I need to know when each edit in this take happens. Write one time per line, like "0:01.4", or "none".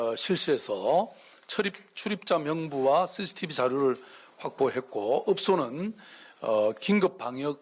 none